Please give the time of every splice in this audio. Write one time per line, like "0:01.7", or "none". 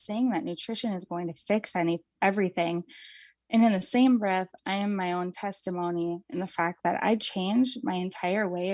none